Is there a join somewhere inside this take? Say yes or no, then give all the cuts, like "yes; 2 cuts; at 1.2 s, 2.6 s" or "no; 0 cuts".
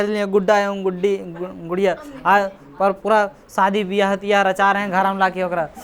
no; 0 cuts